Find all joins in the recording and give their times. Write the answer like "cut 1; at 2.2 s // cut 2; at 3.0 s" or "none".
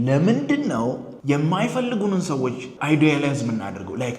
cut 1; at 1.1 s // cut 2; at 2.7 s